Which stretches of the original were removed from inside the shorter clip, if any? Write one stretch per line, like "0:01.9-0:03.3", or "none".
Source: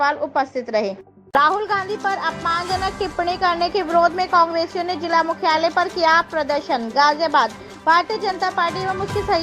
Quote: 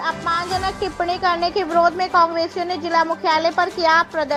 none